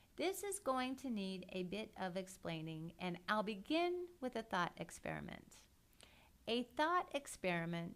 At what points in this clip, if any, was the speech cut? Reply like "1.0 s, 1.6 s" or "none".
2.8 s

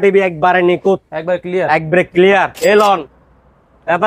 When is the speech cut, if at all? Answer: 2.5 s

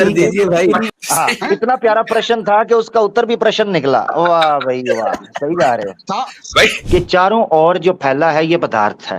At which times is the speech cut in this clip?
0.9 s, 6.8 s

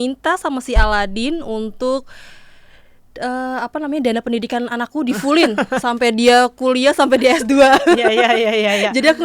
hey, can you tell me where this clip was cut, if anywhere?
none

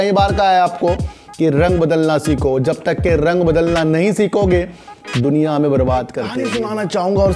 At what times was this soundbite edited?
6.4 s

